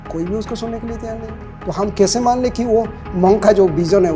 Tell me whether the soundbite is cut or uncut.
uncut